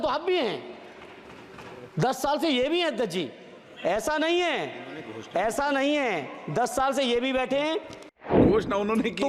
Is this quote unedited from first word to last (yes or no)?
no